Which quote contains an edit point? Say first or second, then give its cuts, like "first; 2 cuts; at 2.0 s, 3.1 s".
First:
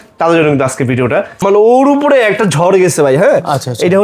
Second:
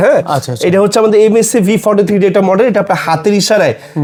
first; 1 cut; at 1.3 s